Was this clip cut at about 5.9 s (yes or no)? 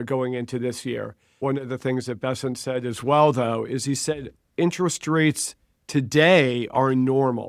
no